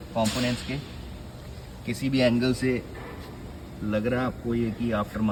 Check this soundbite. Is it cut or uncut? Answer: uncut